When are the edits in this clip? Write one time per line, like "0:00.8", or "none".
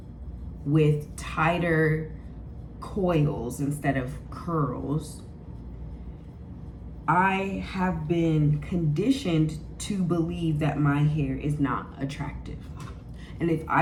none